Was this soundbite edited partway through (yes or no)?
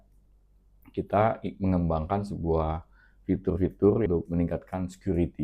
yes